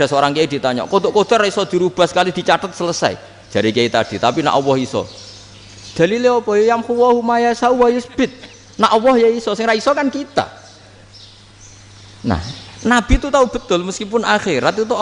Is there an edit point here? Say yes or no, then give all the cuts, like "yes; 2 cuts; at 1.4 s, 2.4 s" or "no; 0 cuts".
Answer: no; 0 cuts